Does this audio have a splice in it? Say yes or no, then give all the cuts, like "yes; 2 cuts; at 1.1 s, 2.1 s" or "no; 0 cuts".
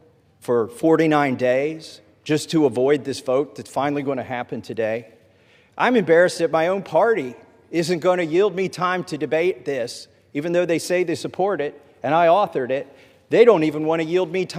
no; 0 cuts